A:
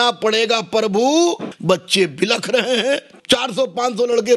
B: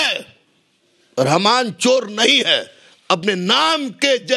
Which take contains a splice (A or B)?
A